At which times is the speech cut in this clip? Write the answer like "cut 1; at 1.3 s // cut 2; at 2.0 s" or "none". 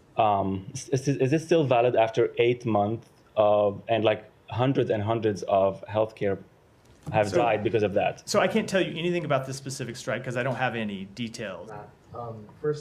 cut 1; at 11.6 s